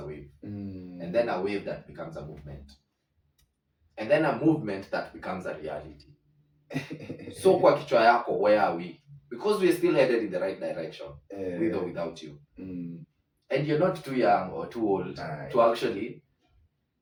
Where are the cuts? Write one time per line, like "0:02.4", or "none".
none